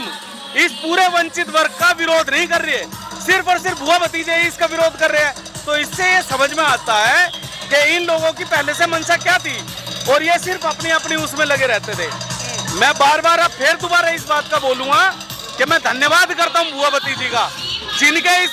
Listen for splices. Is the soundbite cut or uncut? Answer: uncut